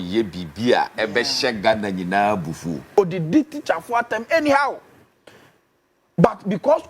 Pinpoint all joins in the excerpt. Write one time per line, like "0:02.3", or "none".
0:00.9
0:02.7